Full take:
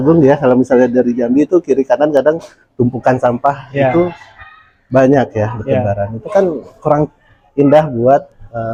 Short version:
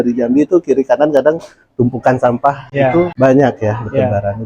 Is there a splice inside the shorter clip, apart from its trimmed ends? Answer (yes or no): yes